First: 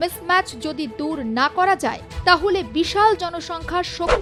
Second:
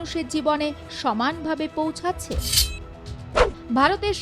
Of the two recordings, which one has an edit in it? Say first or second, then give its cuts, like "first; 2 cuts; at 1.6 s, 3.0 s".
second; 1 cut; at 2.7 s